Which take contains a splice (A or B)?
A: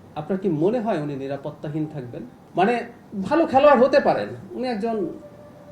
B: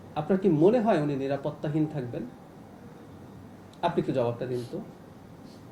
A